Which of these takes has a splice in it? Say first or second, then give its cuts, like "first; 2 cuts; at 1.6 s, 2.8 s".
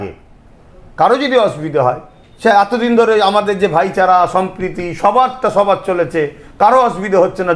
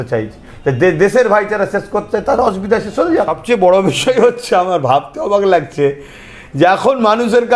second; 1 cut; at 3.4 s